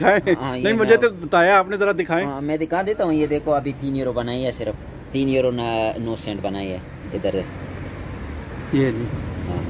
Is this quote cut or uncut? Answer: uncut